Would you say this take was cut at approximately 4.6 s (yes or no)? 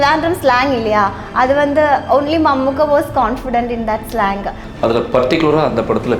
yes